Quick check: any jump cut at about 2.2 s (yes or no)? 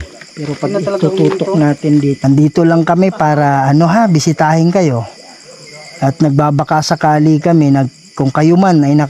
yes